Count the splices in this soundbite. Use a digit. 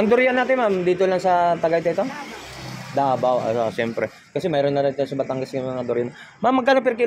0